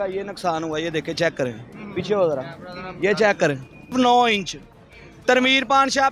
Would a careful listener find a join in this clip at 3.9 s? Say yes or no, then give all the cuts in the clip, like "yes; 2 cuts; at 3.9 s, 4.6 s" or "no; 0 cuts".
yes; 1 cut; at 3.9 s